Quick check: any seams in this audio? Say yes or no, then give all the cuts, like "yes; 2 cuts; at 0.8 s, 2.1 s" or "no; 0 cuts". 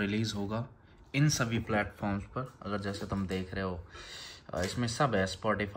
no; 0 cuts